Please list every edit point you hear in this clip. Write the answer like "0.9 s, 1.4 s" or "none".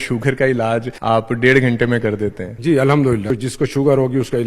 0.9 s, 2.5 s, 3.3 s